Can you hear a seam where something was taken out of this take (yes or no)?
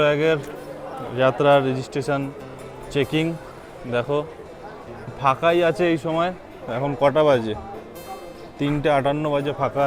no